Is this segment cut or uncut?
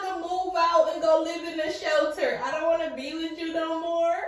uncut